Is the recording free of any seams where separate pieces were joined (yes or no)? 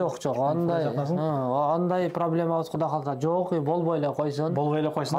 yes